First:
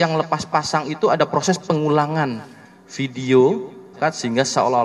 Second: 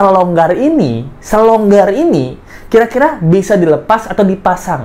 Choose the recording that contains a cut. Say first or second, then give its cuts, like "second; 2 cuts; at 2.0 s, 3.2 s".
first; 1 cut; at 3.9 s